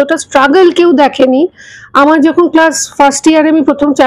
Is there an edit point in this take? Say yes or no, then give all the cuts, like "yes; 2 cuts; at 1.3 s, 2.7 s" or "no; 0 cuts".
no; 0 cuts